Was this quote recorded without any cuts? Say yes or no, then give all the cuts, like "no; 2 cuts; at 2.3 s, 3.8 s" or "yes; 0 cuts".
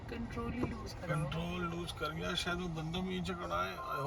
yes; 0 cuts